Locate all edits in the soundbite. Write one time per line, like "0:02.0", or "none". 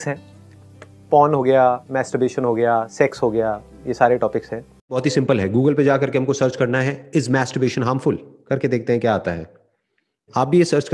0:05.0